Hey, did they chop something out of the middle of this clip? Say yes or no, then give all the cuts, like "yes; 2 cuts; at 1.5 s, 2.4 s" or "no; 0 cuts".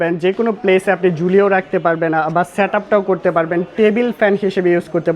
no; 0 cuts